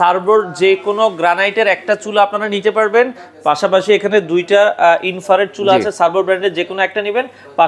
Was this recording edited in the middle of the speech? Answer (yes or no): no